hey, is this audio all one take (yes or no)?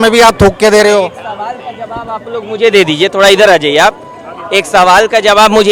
yes